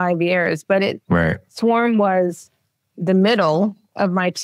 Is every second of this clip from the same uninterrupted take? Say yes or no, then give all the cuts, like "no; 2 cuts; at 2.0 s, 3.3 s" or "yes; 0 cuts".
no; 2 cuts; at 1.4 s, 2.9 s